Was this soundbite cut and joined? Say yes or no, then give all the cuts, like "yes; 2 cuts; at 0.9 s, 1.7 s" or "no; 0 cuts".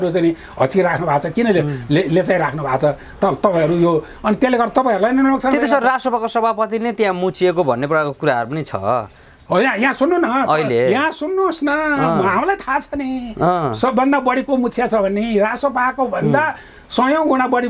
no; 0 cuts